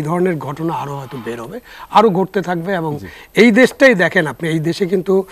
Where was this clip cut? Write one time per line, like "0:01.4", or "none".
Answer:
none